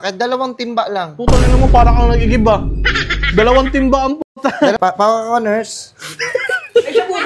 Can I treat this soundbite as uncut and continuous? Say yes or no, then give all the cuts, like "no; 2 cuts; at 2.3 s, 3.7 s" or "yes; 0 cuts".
no; 1 cut; at 4.8 s